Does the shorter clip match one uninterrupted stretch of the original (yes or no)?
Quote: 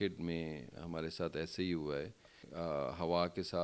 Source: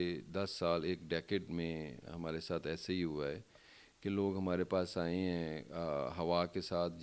no